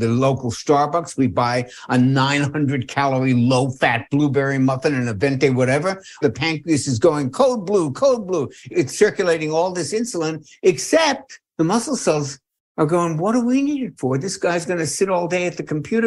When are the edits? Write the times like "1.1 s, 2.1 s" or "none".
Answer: 6.2 s, 8.7 s, 11.4 s